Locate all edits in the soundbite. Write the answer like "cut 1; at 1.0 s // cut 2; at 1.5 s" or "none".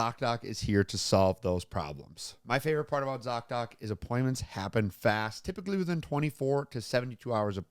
cut 1; at 2.3 s